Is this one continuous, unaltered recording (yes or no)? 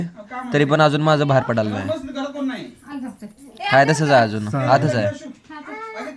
yes